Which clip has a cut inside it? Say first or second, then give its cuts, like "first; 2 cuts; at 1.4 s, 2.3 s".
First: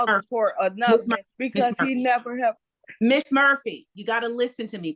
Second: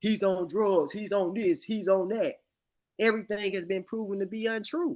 first; 2 cuts; at 1.3 s, 3.9 s